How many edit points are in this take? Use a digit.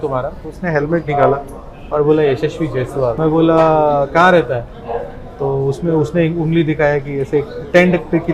1